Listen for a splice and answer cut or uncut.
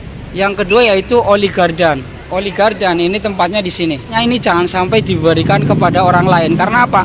cut